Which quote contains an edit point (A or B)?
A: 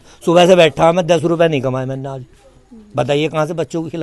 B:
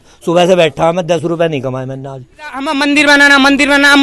B